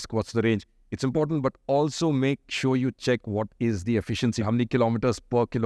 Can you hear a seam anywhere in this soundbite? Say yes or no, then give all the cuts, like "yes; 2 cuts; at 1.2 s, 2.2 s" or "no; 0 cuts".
yes; 1 cut; at 4.4 s